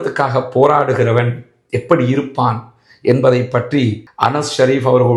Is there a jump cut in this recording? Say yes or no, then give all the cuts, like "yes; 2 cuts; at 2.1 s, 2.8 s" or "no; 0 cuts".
no; 0 cuts